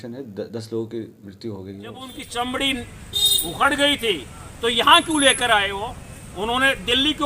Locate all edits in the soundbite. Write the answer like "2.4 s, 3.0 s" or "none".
2.2 s